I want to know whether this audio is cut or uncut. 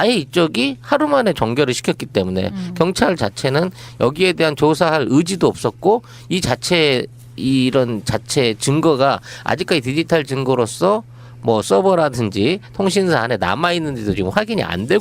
uncut